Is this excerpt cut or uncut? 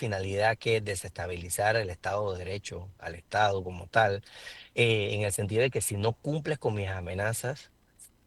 uncut